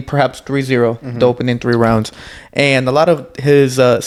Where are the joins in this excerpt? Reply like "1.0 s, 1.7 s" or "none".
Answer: none

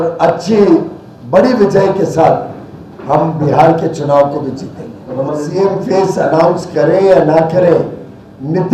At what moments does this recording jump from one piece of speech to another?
5.4 s

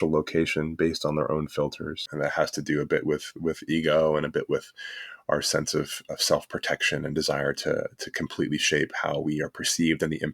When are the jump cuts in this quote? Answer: 2.0 s

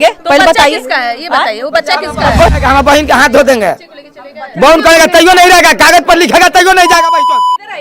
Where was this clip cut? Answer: 2.6 s

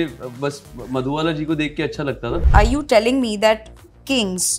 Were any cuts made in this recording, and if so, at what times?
2.4 s

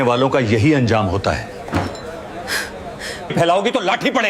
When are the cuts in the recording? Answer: 3.3 s

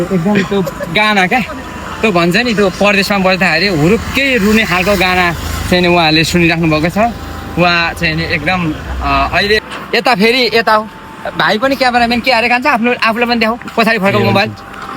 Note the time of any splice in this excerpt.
9.6 s

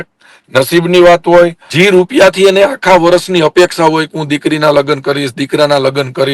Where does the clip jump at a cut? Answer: 1.6 s

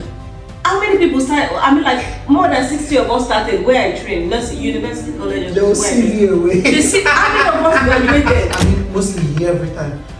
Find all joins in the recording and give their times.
8.7 s

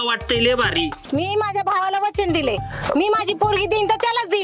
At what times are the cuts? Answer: 1.0 s

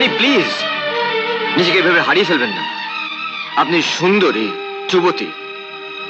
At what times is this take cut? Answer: none

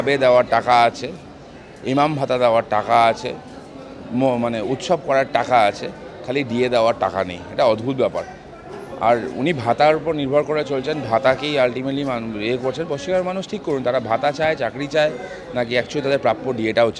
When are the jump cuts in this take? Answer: none

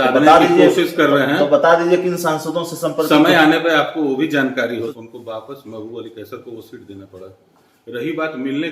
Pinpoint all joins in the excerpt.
4.9 s

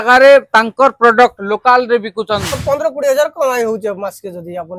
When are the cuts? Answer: 2.6 s

